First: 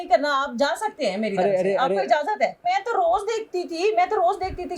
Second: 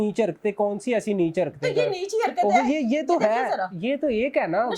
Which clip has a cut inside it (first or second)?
first